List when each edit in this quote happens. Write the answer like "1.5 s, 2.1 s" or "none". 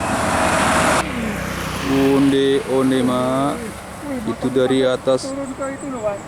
1.0 s